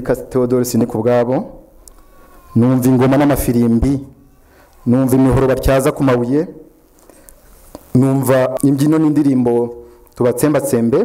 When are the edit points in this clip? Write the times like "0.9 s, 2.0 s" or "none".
8.5 s